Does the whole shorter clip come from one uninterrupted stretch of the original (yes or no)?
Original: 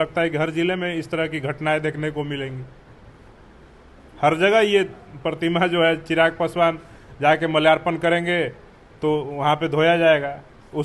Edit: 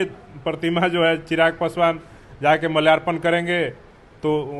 yes